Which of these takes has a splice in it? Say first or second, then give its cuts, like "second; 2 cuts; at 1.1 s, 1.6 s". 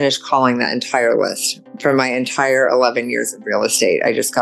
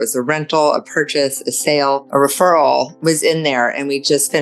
second; 2 cuts; at 2.1 s, 2.9 s